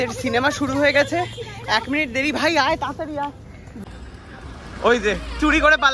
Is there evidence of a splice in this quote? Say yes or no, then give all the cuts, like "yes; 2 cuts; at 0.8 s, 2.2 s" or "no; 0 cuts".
yes; 1 cut; at 3.8 s